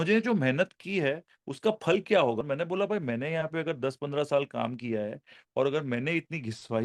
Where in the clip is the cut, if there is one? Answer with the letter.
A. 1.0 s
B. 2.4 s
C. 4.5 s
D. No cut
B